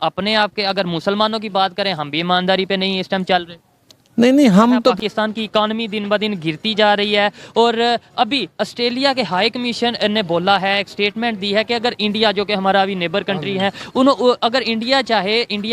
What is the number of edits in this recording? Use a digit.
1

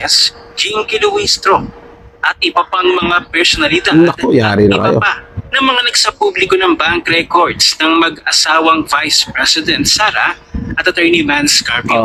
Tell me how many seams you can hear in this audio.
0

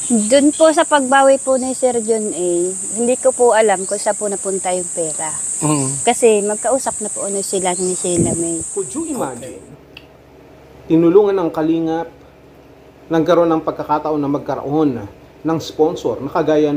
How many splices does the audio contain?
1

